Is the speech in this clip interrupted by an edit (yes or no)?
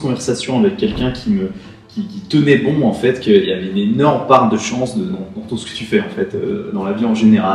no